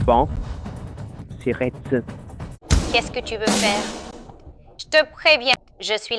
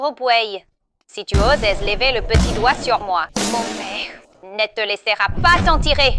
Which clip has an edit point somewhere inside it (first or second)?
first